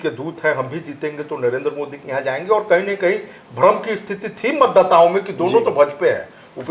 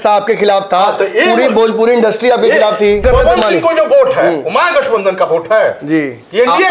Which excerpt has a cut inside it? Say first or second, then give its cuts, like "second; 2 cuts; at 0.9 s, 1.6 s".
second; 1 cut; at 3.0 s